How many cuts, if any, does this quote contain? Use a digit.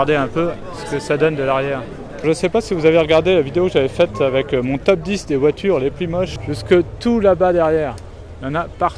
2